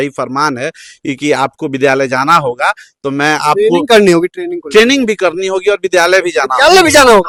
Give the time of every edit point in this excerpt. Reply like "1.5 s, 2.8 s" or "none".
none